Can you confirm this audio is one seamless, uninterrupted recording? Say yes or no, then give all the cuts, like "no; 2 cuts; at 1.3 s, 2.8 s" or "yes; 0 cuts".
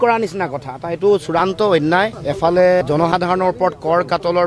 no; 1 cut; at 2.2 s